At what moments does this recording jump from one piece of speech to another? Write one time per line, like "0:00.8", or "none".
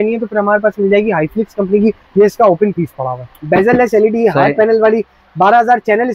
0:02.0
0:03.3